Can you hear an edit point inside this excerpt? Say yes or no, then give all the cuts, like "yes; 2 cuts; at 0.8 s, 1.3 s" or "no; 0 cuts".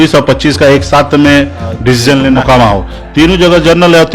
yes; 1 cut; at 2.3 s